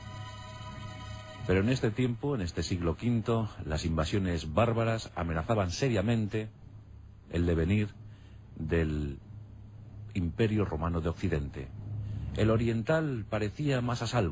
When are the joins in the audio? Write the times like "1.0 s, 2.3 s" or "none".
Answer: 3.0 s